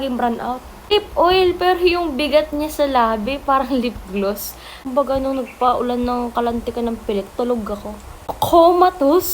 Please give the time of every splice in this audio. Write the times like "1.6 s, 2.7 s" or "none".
0.9 s, 4.8 s, 8.3 s